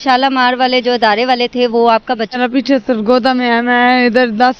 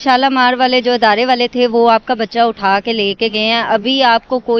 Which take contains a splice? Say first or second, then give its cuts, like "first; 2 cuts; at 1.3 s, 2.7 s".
first; 1 cut; at 2.4 s